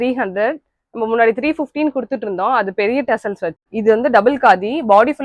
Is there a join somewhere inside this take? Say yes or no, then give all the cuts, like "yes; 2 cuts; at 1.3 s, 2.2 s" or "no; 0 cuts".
yes; 1 cut; at 3.6 s